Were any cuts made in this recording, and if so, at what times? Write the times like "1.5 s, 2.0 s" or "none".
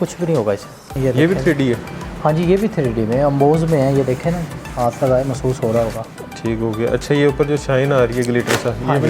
1.0 s